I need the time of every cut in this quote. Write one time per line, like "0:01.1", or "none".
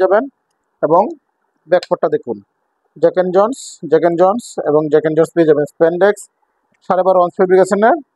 none